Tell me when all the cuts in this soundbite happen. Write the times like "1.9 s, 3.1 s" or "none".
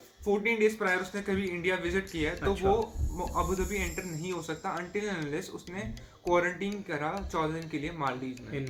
none